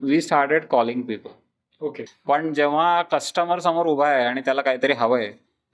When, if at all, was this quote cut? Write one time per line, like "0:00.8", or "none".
0:02.1